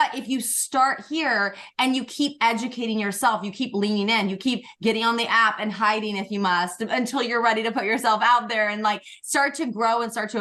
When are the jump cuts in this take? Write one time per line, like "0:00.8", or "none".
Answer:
none